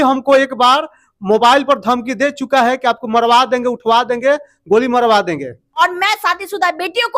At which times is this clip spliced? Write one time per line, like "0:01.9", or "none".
0:05.8